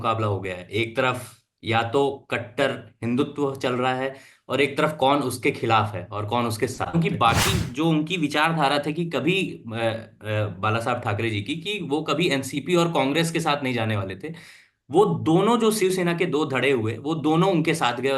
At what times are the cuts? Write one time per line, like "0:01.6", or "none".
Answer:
0:06.9